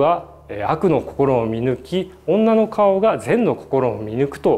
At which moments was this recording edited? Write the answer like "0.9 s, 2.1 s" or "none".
none